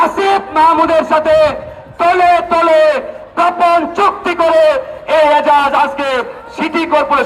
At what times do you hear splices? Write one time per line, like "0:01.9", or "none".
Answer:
none